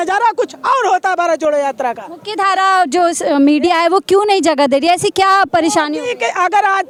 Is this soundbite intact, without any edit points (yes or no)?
yes